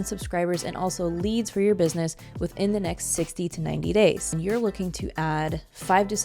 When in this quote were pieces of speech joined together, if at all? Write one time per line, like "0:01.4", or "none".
0:04.3